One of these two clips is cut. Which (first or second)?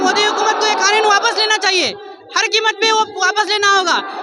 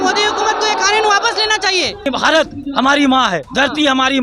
second